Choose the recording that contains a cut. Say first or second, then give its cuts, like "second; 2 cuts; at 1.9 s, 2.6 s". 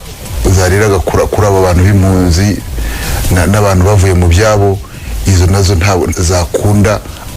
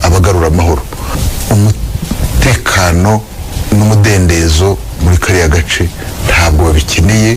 first; 1 cut; at 6.1 s